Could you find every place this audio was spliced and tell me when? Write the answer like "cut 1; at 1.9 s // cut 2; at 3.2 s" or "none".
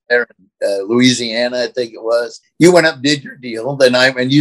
cut 1; at 2.4 s